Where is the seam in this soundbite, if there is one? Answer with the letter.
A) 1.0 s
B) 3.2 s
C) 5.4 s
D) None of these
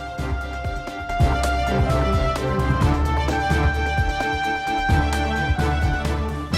A